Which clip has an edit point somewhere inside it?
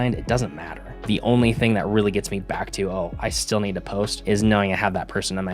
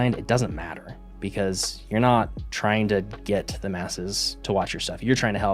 first; 2 cuts; at 1.0 s, 4.2 s

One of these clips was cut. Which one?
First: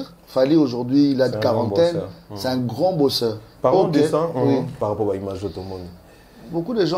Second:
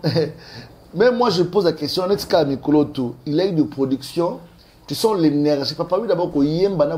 first; 1 cut; at 4.8 s

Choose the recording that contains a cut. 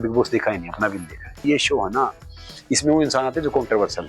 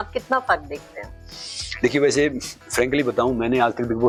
first; 1 cut; at 1.4 s

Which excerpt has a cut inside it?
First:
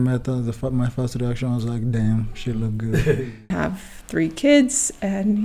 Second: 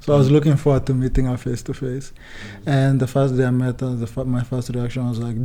first; 1 cut; at 3.4 s

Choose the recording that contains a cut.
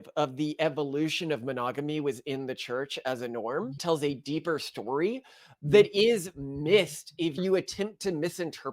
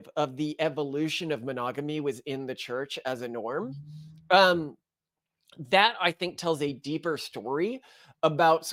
first; 3 cuts; at 3.8 s, 5.4 s, 7.4 s

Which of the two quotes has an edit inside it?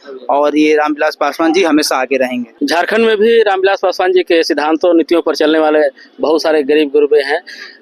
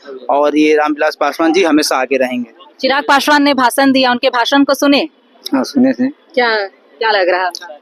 first; 1 cut; at 2.5 s

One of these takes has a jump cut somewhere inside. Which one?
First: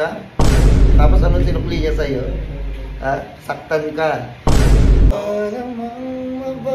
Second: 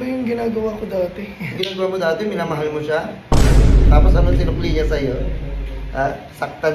first; 1 cut; at 5.1 s

